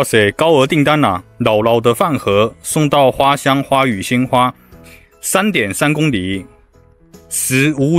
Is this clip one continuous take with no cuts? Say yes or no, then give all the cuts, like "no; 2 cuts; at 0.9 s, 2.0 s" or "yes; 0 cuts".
yes; 0 cuts